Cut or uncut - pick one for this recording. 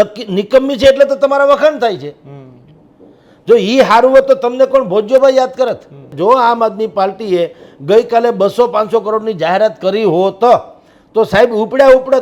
cut